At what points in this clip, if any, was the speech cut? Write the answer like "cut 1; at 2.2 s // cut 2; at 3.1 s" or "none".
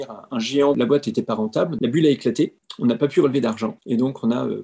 cut 1; at 0.8 s // cut 2; at 1.7 s // cut 3; at 2.6 s // cut 4; at 3.8 s